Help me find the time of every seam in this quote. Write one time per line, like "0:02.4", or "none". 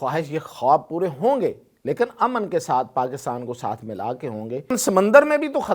0:04.7